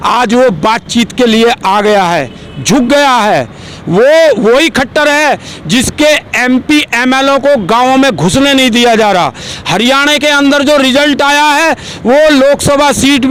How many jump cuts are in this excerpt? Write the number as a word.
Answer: zero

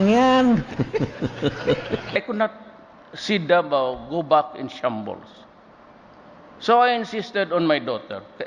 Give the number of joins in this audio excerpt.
one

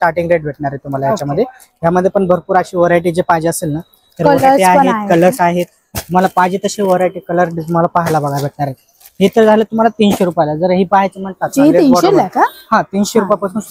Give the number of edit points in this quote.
zero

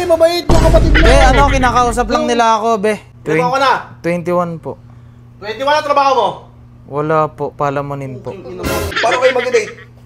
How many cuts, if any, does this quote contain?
two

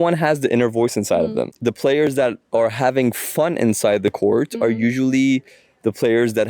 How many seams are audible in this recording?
one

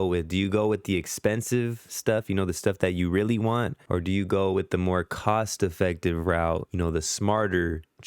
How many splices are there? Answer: two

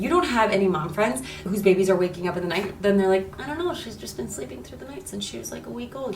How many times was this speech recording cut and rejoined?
one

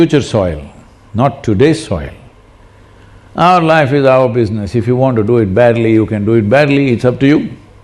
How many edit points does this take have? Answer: zero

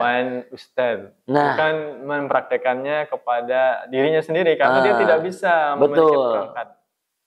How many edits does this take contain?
zero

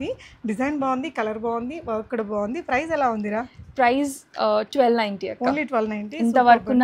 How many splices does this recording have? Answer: zero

